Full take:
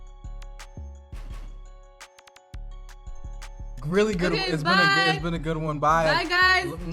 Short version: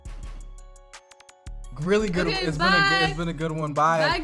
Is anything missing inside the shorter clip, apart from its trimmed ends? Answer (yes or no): yes